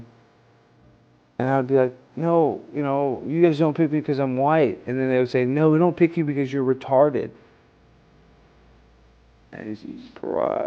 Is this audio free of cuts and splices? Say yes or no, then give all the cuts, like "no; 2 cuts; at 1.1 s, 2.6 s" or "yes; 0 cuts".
yes; 0 cuts